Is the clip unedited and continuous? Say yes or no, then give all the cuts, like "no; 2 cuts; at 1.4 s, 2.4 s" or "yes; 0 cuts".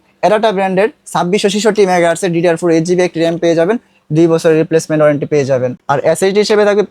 no; 1 cut; at 5.8 s